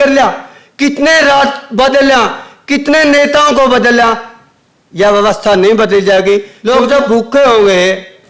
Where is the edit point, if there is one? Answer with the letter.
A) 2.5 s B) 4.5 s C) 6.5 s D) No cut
C